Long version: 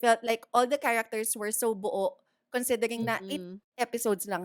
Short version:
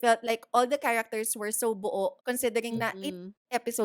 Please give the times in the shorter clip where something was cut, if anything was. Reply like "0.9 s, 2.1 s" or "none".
2.2 s